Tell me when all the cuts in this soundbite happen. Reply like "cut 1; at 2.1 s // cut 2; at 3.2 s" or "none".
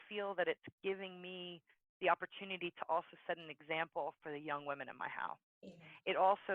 none